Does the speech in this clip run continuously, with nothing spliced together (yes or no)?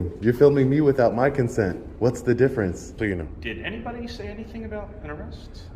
no